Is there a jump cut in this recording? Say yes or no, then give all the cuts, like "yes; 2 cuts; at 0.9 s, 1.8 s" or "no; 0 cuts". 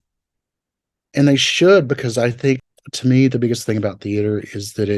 yes; 1 cut; at 2.6 s